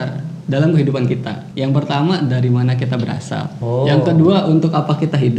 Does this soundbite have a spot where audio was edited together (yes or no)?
yes